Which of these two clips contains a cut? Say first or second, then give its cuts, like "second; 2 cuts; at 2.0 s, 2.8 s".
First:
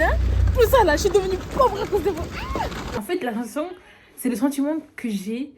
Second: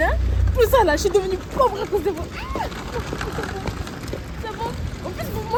first; 1 cut; at 3.0 s